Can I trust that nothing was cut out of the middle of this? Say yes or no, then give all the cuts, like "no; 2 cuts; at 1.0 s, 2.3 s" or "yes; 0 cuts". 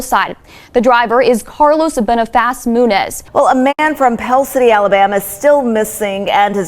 no; 1 cut; at 3.2 s